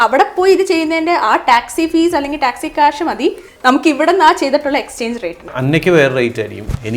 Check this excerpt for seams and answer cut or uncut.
cut